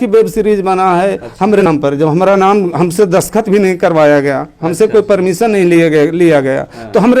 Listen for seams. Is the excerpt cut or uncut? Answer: cut